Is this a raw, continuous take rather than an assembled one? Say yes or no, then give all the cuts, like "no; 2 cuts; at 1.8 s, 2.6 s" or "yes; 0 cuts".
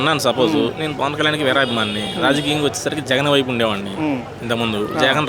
yes; 0 cuts